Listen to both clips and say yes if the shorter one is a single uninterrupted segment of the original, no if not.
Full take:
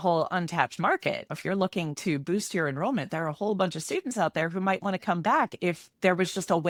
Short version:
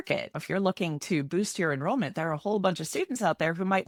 yes